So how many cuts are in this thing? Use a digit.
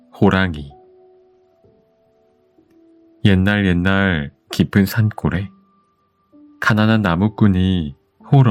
2